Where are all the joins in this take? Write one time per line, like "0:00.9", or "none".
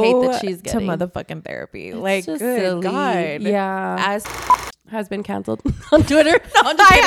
0:04.3

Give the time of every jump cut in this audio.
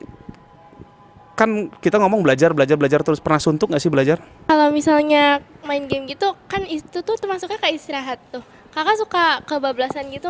0:04.3

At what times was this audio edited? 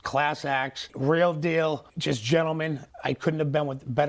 none

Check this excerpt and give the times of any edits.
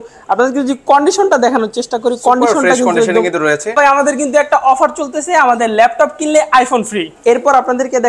0:03.7
0:07.1

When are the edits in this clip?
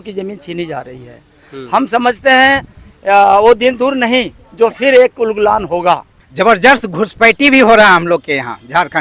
0:06.2

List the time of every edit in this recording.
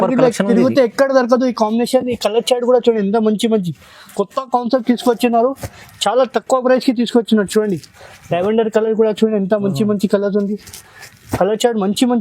none

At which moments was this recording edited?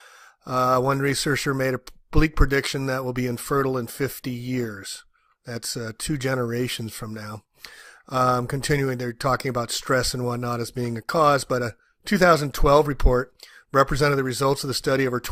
0:03.7

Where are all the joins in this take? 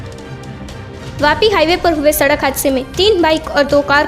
0:01.0

